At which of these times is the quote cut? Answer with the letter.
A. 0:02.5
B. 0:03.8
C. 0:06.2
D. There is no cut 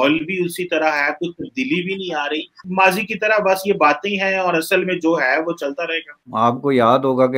D